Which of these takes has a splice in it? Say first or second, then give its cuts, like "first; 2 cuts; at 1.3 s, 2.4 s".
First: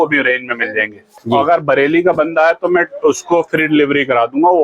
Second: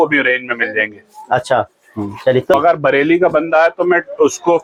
first; 1 cut; at 1.3 s